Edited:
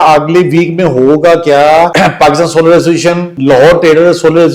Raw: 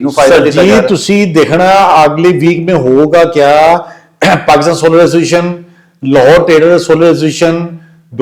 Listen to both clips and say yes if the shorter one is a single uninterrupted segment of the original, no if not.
no